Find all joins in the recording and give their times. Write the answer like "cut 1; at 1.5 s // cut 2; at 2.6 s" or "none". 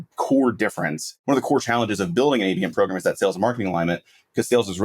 cut 1; at 1.1 s